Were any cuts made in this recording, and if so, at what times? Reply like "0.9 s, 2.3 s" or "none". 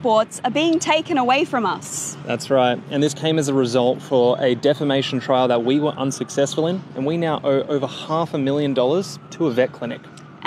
none